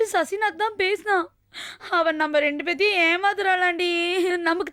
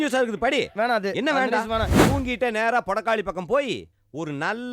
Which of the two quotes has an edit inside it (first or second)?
second